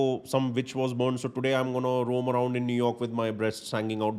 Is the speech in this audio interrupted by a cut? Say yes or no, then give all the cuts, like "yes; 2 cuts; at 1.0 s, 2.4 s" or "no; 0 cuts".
no; 0 cuts